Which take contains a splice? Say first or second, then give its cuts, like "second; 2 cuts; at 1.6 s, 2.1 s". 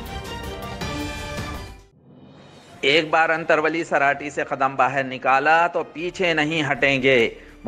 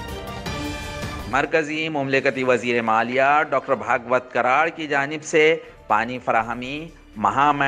second; 1 cut; at 1.0 s